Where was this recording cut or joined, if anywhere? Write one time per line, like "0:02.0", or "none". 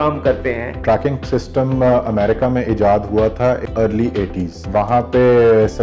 0:00.8
0:03.6
0:04.6